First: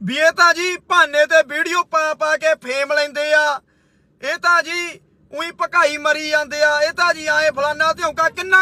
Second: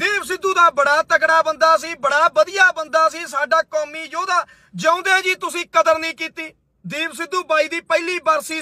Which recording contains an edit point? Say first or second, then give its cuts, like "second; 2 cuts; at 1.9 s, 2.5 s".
second; 1 cut; at 6.7 s